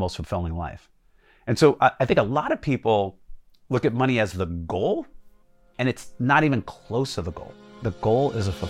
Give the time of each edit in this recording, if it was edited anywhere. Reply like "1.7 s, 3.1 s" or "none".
7.8 s